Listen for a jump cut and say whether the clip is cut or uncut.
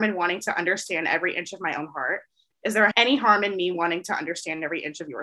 cut